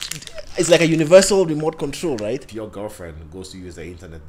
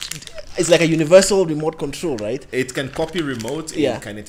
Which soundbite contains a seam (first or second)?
first